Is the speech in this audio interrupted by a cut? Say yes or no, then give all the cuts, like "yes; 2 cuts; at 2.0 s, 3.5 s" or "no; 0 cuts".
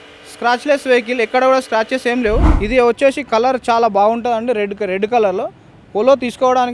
yes; 1 cut; at 2.5 s